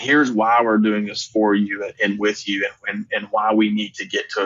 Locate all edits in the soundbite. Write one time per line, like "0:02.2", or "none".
none